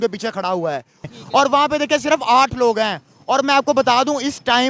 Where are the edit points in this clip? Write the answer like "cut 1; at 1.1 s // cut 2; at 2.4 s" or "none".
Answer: cut 1; at 1.0 s